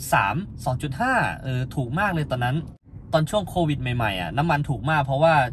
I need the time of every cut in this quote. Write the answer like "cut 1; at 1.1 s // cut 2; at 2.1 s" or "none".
none